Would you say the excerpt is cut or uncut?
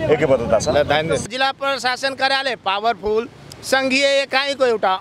cut